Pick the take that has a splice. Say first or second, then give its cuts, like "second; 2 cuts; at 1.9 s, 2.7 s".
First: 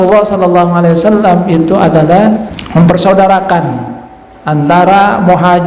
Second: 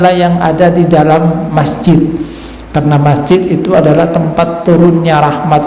first; 1 cut; at 2.6 s